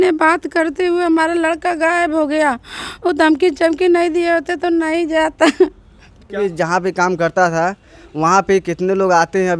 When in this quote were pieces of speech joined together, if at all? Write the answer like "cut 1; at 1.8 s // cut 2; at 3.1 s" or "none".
cut 1; at 6.3 s